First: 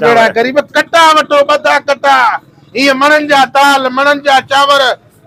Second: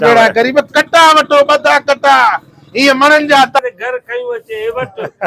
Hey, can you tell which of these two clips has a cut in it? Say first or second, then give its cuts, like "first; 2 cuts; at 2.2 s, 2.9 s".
second; 1 cut; at 3.6 s